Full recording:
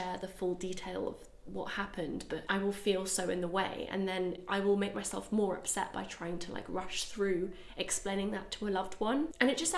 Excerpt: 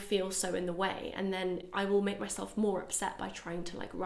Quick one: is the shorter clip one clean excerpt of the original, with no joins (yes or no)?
yes